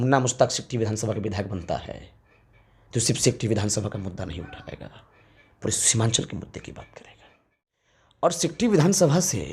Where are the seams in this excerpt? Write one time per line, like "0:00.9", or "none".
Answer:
0:07.8